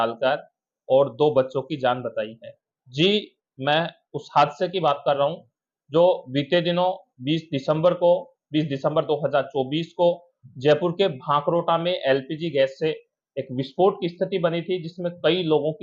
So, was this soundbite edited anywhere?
no; 0 cuts

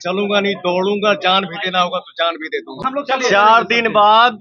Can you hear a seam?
yes; 1 cut; at 2.7 s

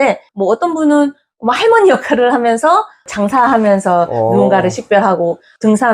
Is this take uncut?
yes; 0 cuts

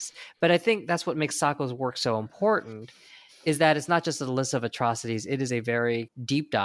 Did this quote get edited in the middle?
no; 0 cuts

